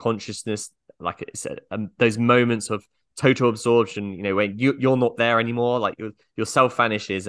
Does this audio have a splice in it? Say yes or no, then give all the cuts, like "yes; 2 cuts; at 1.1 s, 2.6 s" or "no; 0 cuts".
no; 0 cuts